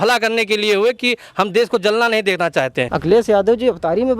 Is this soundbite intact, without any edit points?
no; 1 cut; at 2.9 s

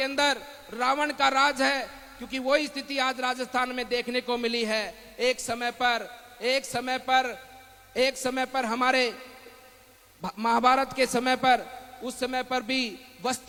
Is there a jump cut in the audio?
no; 0 cuts

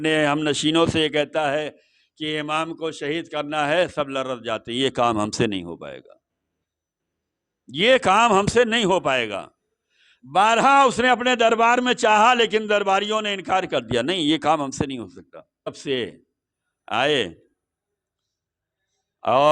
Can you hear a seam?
yes; 1 cut; at 15.7 s

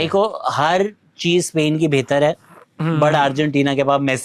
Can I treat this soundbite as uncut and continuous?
yes; 0 cuts

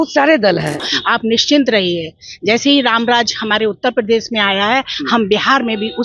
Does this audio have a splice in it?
yes; 1 cut; at 0.9 s

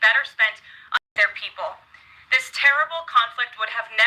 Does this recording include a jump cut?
yes; 1 cut; at 1.1 s

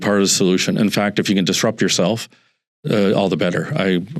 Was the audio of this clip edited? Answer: no; 0 cuts

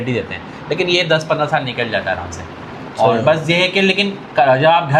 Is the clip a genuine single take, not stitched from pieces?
yes; 0 cuts

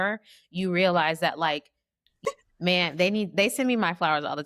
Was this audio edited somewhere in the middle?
yes; 1 cut; at 2.3 s

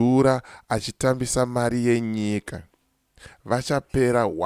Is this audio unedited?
yes; 0 cuts

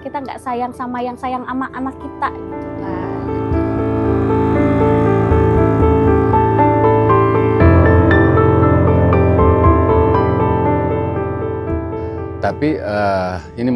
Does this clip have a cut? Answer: no; 0 cuts

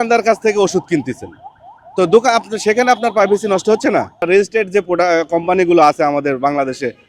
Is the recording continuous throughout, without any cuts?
no; 1 cut; at 4.2 s

